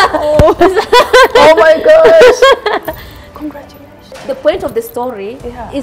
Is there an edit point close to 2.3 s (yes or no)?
no